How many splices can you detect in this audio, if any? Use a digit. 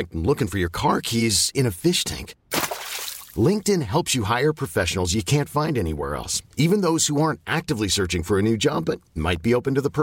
0